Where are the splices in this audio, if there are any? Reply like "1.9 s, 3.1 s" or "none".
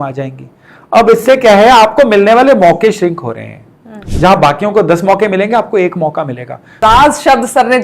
6.8 s